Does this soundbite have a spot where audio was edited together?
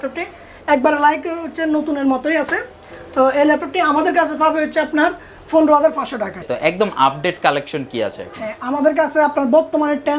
yes; 1 cut; at 6.4 s

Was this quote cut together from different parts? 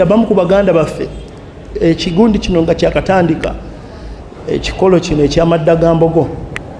no; 0 cuts

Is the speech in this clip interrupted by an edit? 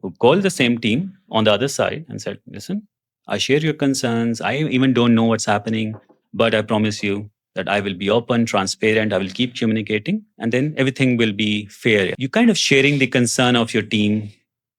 yes; 1 cut; at 12.2 s

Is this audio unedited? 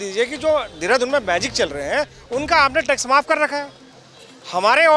yes; 0 cuts

